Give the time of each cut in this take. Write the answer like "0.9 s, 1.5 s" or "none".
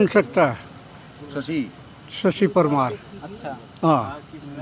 none

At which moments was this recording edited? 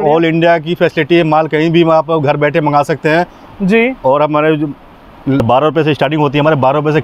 5.4 s

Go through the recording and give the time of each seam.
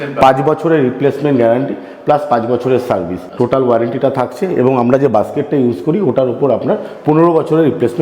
3.2 s

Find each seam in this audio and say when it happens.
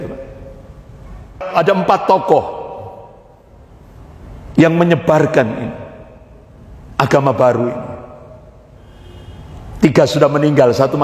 1.5 s

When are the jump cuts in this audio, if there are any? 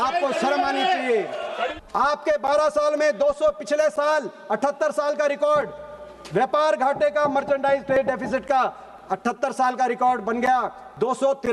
1.4 s

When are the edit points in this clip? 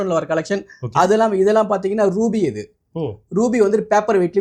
none

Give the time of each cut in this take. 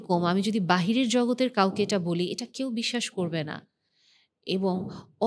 none

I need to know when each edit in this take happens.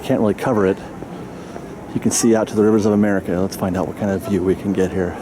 none

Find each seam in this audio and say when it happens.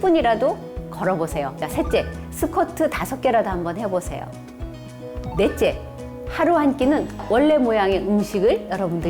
1.6 s, 7.2 s

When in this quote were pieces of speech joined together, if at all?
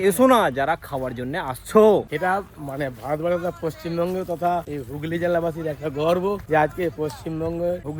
none

